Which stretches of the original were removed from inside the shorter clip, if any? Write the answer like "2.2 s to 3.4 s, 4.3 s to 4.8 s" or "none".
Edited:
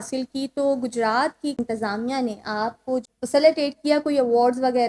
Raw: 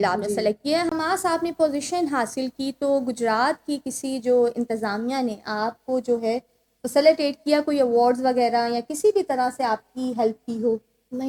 3.8 s to 4.6 s, 6.0 s to 6.6 s